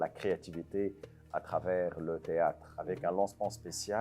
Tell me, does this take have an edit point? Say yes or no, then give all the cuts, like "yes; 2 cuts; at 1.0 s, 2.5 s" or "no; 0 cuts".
yes; 1 cut; at 2.7 s